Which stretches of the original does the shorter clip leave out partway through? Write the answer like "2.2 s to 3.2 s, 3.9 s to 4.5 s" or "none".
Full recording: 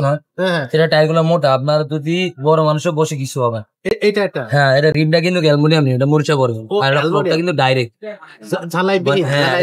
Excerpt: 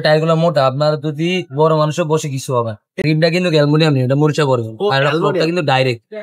3.9 s to 4.9 s